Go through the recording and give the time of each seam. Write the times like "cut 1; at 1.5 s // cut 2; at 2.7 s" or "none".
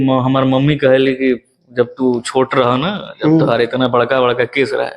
none